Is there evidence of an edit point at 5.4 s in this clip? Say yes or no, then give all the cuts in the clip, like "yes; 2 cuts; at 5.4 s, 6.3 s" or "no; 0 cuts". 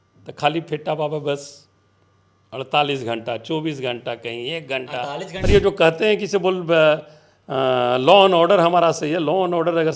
yes; 1 cut; at 5.4 s